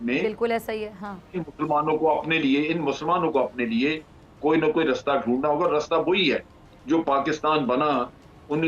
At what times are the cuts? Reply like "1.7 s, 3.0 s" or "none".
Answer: none